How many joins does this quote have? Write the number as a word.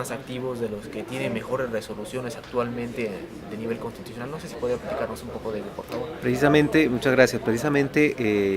one